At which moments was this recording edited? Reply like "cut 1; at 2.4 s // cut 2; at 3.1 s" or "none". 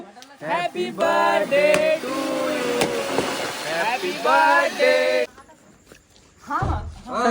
cut 1; at 5.4 s